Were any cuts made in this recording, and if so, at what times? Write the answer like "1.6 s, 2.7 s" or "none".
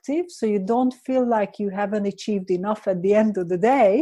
none

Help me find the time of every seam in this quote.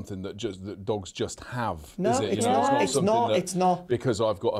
none

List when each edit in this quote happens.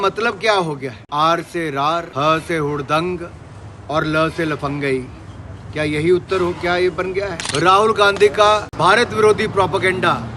0.9 s, 2.1 s, 7.4 s, 8.7 s

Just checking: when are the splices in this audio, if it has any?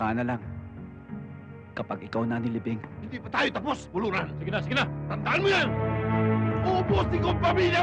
3.0 s, 5.8 s

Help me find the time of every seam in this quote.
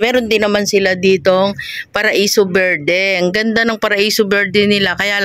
none

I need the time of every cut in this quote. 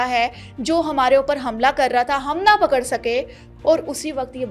3.5 s

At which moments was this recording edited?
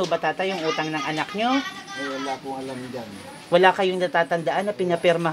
none

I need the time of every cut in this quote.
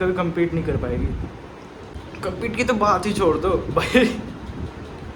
1.9 s

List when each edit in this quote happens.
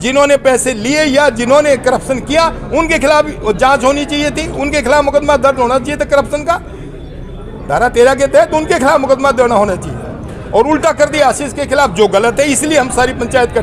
none

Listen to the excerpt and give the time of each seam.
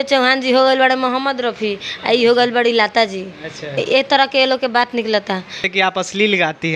5.6 s

